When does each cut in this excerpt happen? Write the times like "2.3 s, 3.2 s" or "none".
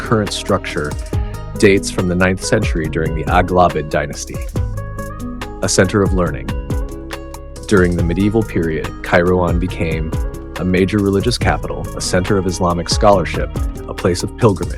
none